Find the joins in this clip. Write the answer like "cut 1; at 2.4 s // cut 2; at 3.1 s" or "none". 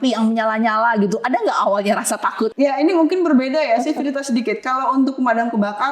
cut 1; at 2.5 s